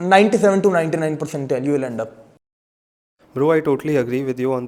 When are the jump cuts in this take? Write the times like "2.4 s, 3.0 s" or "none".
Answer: none